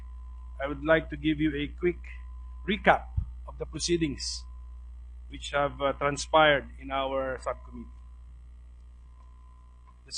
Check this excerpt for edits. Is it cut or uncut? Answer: uncut